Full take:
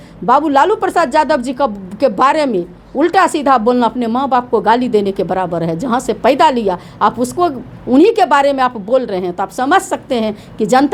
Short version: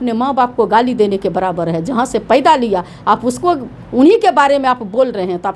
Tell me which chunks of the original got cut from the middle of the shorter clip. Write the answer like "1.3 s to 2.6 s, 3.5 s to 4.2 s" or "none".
none